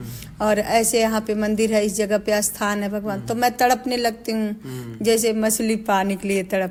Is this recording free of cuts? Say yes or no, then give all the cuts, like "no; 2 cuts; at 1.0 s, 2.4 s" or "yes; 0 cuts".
yes; 0 cuts